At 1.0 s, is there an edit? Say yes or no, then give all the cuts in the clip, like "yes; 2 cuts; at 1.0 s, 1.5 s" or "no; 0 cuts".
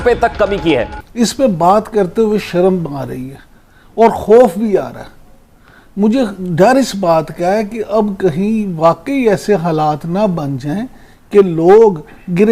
yes; 1 cut; at 1.0 s